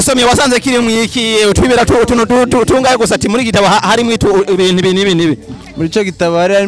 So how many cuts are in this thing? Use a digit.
0